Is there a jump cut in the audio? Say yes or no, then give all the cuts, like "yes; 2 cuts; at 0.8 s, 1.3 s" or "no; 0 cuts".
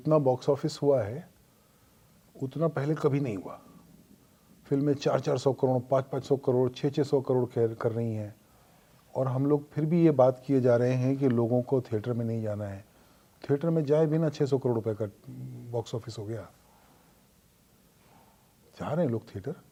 no; 0 cuts